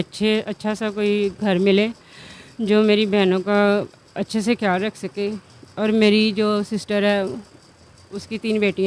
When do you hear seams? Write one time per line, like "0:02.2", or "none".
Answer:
none